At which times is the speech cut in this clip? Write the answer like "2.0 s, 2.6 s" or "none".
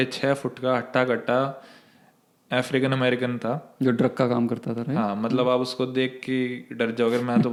none